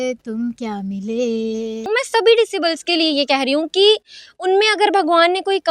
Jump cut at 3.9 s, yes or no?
no